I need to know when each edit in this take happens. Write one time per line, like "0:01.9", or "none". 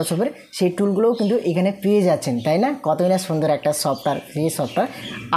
none